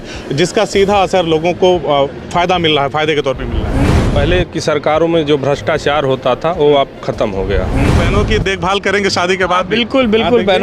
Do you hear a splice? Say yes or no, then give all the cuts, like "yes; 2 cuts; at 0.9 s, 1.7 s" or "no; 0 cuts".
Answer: yes; 2 cuts; at 3.9 s, 8.0 s